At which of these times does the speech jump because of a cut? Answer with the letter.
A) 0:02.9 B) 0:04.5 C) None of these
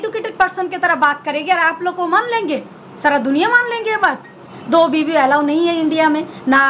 B